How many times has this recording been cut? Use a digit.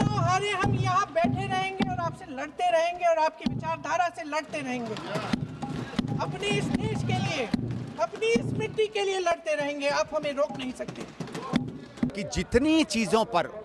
1